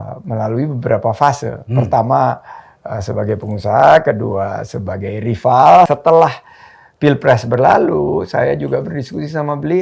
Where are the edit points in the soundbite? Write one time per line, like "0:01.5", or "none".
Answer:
0:05.9